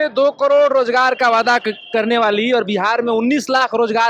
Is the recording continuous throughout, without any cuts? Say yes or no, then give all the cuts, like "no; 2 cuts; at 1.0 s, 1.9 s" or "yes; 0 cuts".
yes; 0 cuts